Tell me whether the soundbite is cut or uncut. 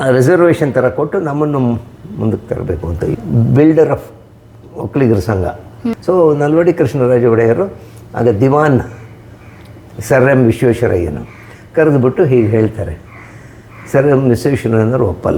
cut